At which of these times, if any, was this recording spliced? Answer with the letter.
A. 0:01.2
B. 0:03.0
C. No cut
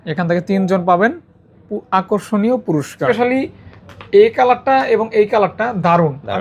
B